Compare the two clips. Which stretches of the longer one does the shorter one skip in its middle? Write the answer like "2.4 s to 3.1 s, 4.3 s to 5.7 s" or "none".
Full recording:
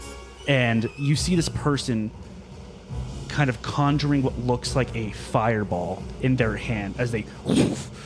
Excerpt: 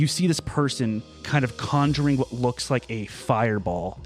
2.2 s to 3.2 s